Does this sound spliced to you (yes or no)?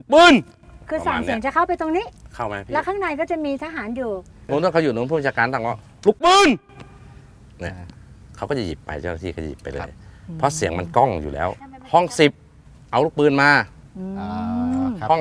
no